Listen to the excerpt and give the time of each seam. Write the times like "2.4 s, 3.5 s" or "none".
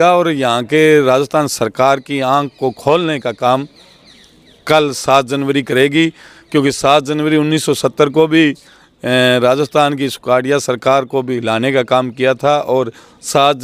none